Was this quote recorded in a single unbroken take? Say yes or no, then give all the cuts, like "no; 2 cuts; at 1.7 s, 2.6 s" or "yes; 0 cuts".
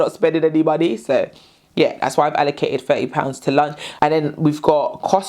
yes; 0 cuts